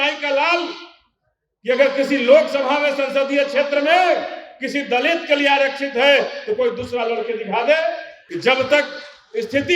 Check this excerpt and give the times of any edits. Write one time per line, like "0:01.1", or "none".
0:08.2